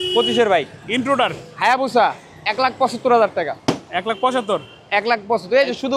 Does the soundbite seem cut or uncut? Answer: uncut